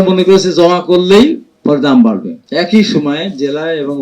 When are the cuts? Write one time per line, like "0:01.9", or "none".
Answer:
0:02.3